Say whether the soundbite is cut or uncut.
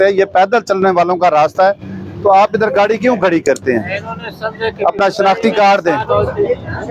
uncut